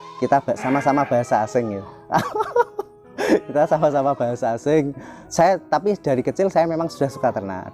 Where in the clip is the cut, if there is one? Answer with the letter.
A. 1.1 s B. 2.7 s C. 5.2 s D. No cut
C